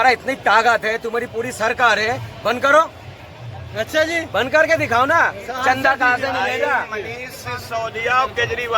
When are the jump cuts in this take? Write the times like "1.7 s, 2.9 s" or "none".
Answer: none